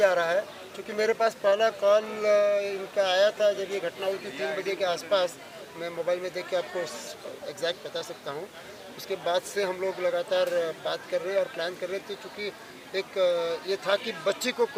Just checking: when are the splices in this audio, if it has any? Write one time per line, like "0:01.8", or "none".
none